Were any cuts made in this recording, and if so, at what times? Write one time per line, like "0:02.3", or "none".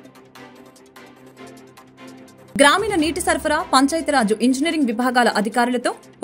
0:01.3